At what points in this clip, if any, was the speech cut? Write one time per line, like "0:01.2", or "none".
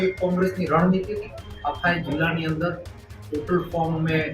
0:01.3